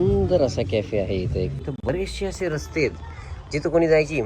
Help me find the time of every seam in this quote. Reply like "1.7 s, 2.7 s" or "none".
1.6 s